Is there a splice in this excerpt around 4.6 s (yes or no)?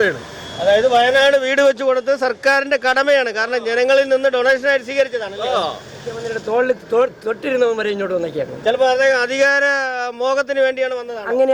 no